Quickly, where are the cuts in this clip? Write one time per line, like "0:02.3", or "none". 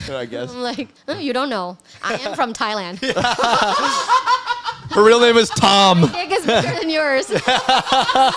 none